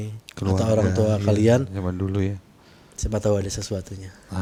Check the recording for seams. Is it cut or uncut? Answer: uncut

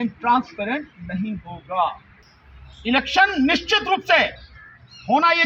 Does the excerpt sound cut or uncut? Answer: uncut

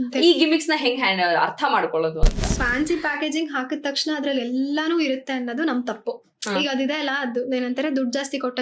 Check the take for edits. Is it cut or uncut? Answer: cut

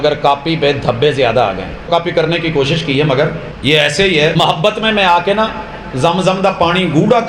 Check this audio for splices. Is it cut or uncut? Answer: cut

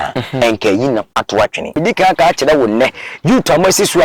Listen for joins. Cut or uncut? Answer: cut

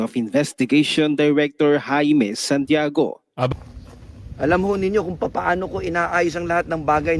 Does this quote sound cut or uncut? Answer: cut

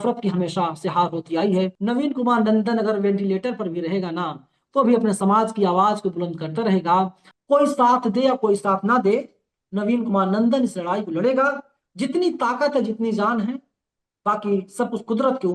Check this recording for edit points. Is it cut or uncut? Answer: cut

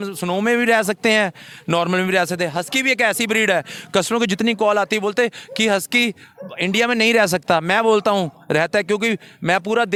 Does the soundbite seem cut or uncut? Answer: uncut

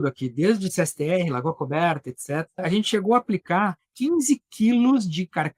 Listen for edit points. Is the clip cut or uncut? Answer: cut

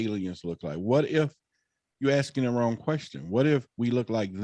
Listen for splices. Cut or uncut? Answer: uncut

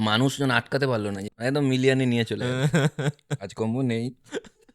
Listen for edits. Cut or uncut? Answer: cut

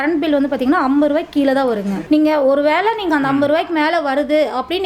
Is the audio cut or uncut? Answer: cut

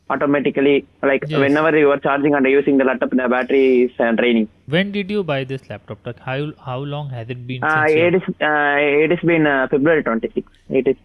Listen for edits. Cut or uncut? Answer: uncut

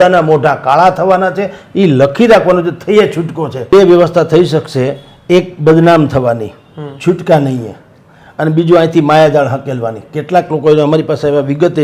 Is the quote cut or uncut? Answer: cut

